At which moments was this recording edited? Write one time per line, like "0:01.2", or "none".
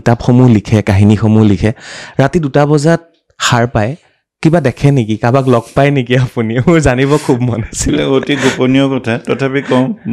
none